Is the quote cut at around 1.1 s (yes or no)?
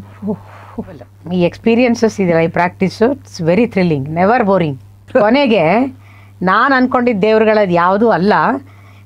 yes